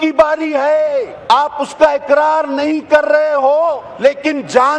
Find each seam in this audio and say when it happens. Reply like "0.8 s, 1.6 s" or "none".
1.1 s, 3.9 s